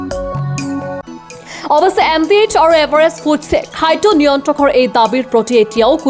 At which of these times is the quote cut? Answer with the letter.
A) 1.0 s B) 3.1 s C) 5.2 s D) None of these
A